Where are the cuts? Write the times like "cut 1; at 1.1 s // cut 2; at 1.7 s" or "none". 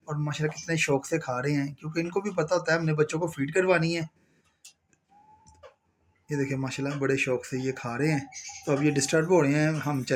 none